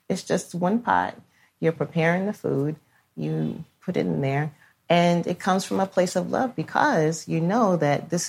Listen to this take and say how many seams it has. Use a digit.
0